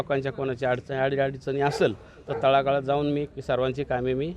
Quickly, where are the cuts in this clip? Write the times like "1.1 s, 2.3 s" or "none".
3.3 s